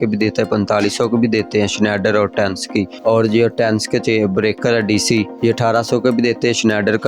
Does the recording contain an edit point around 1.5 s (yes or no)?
no